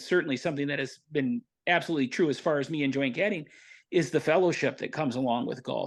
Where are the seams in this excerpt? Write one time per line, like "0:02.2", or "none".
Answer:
0:01.5